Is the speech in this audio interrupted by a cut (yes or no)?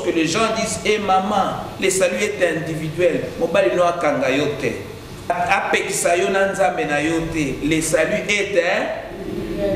yes